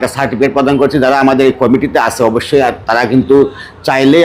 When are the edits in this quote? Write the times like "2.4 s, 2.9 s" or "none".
none